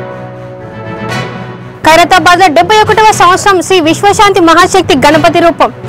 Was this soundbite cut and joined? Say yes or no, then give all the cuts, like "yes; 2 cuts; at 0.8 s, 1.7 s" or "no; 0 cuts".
yes; 1 cut; at 1.0 s